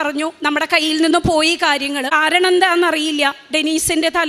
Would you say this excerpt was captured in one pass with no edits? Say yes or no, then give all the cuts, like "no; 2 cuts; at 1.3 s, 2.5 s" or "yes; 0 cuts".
no; 1 cut; at 2.1 s